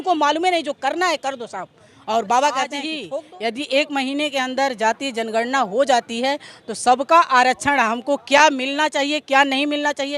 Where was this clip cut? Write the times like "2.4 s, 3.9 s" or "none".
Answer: 2.9 s